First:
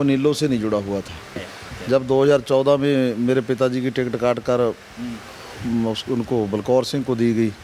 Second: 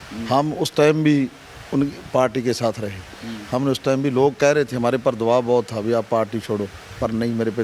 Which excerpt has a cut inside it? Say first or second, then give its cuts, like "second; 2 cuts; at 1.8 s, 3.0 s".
first; 1 cut; at 1.4 s